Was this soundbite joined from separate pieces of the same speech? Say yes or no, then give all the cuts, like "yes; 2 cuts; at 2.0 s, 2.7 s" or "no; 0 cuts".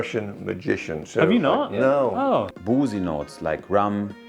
yes; 1 cut; at 2.5 s